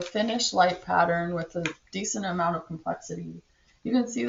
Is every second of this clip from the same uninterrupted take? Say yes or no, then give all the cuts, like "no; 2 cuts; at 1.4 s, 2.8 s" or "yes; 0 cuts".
yes; 0 cuts